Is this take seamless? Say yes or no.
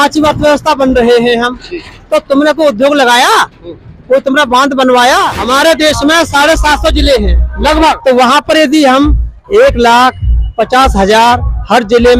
no